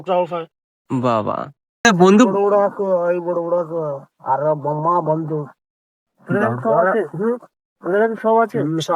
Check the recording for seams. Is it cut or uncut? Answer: cut